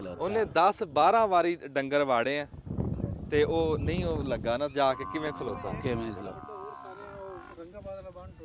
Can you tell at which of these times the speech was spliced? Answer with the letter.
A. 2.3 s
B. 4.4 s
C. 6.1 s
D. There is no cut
D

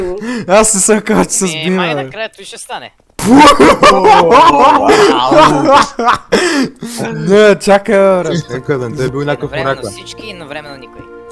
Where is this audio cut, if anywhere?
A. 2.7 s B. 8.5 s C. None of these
B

